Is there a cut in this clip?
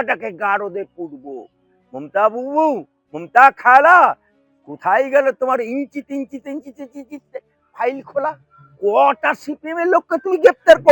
no; 0 cuts

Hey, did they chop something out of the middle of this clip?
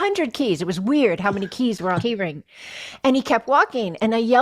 yes; 1 cut; at 2.0 s

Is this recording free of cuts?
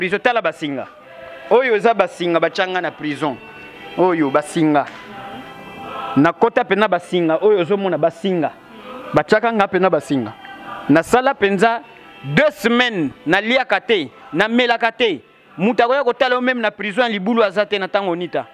yes; 0 cuts

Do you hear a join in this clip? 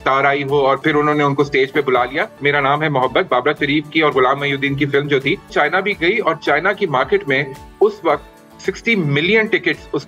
yes; 3 cuts; at 0.8 s, 2.4 s, 5.5 s

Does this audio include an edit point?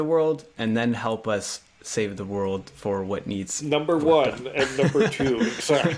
no; 0 cuts

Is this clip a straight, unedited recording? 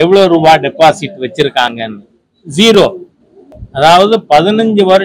yes; 0 cuts

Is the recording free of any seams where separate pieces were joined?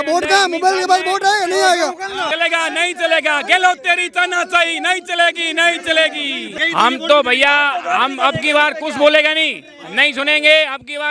no; 2 cuts; at 2.3 s, 6.6 s

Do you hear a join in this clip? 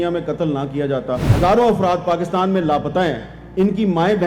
yes; 1 cut; at 1.3 s

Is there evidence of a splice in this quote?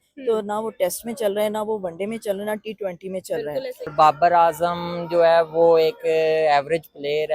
yes; 1 cut; at 3.9 s

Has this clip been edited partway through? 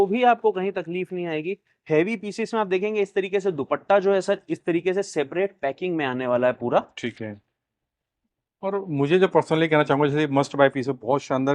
no; 0 cuts

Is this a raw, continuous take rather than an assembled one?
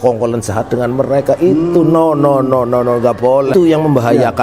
no; 1 cut; at 3.5 s

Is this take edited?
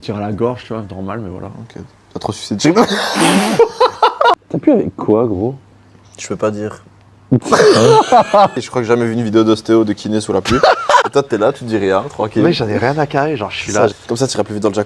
yes; 4 cuts; at 4.4 s, 8.6 s, 11.1 s, 13.9 s

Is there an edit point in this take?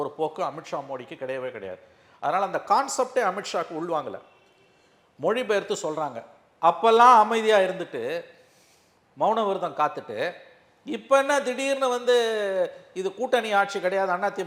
no; 0 cuts

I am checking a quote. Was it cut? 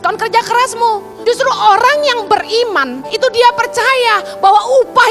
yes; 2 cuts; at 1.1 s, 3.0 s

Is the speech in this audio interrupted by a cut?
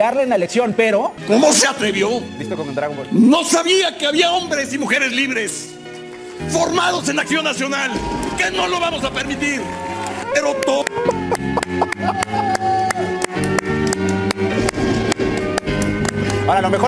yes; 1 cut; at 1.2 s

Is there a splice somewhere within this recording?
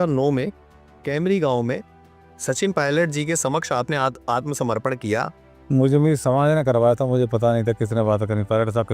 yes; 1 cut; at 5.6 s

